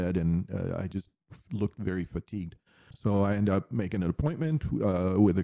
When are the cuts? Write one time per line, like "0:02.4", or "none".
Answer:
0:02.9